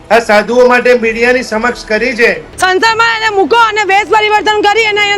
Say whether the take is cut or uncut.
cut